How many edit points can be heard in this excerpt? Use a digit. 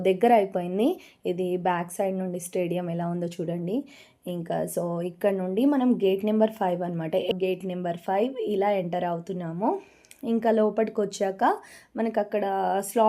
1